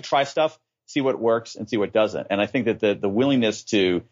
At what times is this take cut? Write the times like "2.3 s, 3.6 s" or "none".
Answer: none